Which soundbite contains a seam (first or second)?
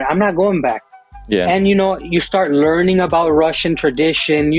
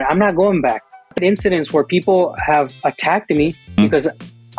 second